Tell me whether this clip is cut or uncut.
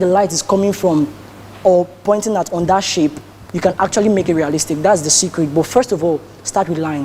uncut